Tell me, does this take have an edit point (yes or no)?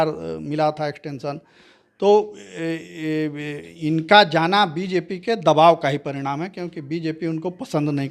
no